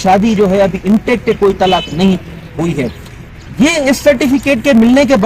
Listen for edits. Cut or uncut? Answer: uncut